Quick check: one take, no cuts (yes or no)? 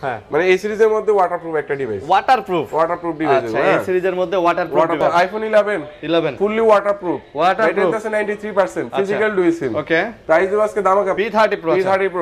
no